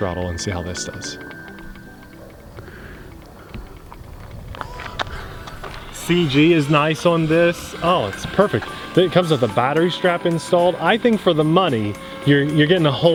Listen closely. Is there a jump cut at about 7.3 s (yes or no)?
no